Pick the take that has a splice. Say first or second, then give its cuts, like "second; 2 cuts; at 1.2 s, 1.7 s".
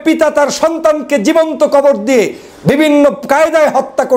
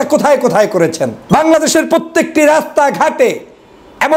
second; 1 cut; at 1.1 s